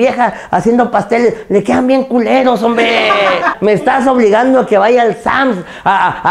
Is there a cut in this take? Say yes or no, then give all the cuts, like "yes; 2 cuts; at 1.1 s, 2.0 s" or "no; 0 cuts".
yes; 1 cut; at 3.5 s